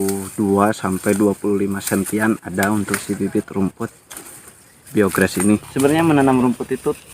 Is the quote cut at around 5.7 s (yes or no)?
yes